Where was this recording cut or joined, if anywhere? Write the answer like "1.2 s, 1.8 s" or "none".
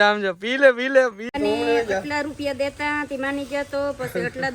1.3 s

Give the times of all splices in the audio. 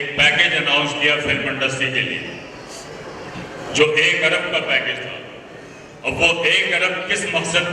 none

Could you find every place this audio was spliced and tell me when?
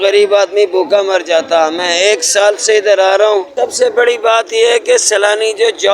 3.5 s

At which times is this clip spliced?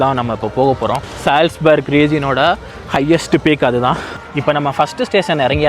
1.1 s, 4.2 s

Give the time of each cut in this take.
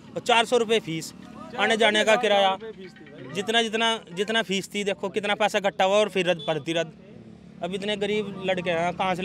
none

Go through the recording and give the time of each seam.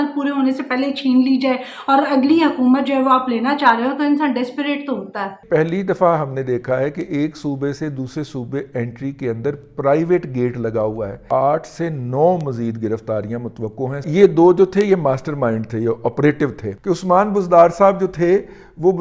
5.4 s, 11.2 s, 14.0 s, 16.7 s

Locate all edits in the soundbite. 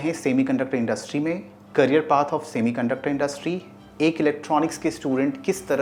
none

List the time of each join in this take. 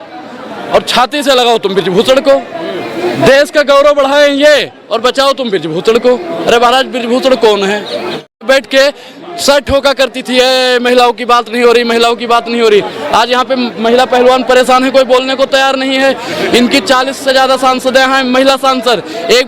8.4 s

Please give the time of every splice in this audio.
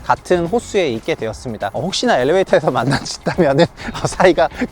1.7 s

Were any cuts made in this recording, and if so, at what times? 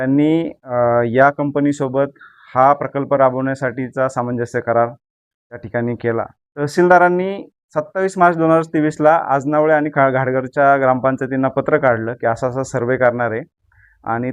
6.4 s

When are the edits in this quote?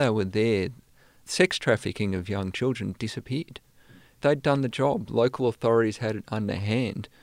1.2 s, 4.2 s

